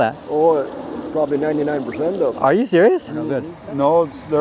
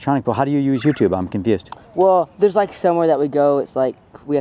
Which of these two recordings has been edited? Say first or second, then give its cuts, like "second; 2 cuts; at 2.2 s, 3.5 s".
first; 1 cut; at 3.5 s